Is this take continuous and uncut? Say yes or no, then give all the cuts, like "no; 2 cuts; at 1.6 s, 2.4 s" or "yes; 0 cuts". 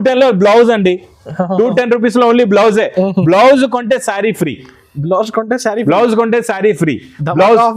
yes; 0 cuts